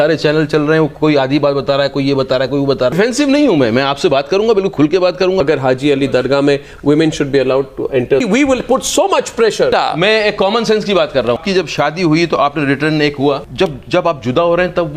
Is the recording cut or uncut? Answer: cut